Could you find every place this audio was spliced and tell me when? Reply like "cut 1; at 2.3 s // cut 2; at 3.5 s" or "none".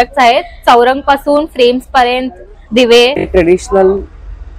cut 1; at 3.2 s